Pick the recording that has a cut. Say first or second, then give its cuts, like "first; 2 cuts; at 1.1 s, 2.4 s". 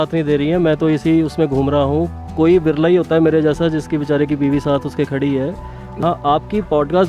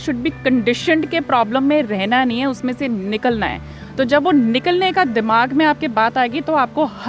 first; 1 cut; at 6.0 s